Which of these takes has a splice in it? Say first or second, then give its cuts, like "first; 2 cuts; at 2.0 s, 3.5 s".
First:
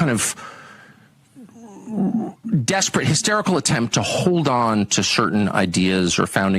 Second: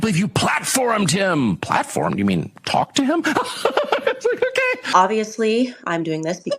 second; 1 cut; at 4.9 s